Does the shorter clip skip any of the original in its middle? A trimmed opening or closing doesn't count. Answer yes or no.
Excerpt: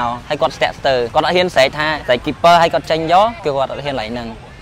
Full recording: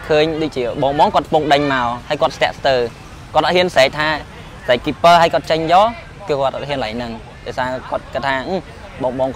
yes